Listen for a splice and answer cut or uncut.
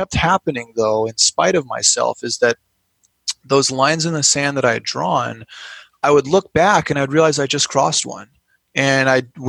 uncut